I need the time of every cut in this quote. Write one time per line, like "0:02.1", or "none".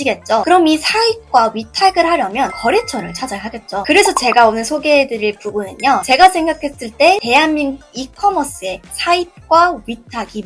none